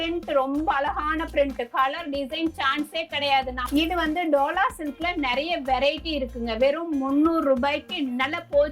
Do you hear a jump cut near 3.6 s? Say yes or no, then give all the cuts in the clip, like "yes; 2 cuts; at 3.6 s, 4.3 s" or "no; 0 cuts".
yes; 1 cut; at 3.6 s